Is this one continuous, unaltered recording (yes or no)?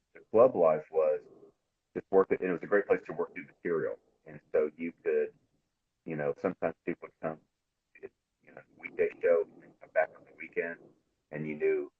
yes